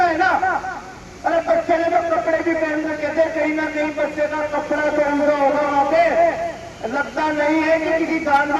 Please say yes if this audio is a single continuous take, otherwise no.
yes